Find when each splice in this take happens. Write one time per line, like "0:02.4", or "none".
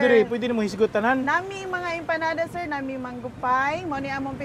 none